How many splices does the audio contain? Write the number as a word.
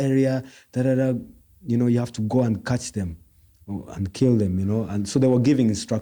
zero